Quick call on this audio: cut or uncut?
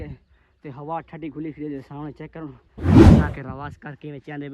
cut